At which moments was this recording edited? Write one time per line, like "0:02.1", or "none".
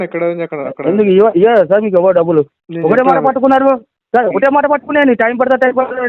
0:02.6